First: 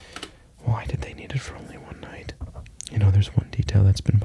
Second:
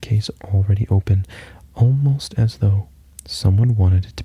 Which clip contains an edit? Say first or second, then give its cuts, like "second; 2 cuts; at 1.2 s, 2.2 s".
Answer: first; 1 cut; at 2.7 s